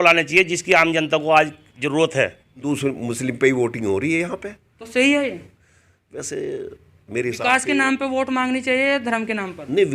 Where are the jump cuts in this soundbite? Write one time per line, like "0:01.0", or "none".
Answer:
0:02.6